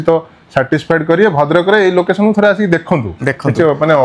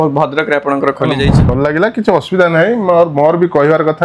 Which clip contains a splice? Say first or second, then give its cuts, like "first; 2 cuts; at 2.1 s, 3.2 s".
second; 1 cut; at 1.4 s